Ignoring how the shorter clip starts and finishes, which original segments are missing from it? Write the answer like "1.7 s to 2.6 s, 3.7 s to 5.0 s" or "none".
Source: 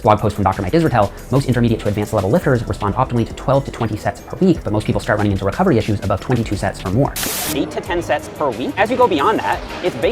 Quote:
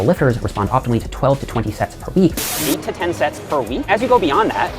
4.6 s to 7.3 s